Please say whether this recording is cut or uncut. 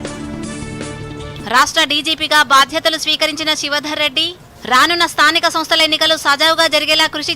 cut